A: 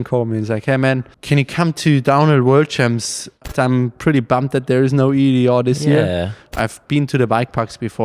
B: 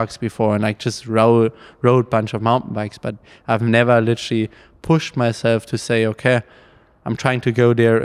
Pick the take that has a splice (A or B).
A